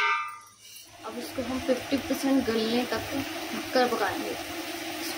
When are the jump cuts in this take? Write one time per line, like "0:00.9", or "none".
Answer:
0:00.9